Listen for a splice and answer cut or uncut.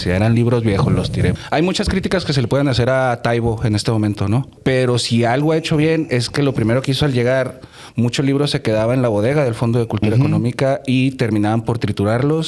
cut